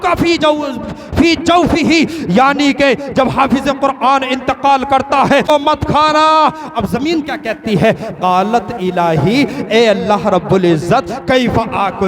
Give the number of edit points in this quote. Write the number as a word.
one